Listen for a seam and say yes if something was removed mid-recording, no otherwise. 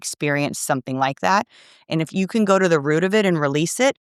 no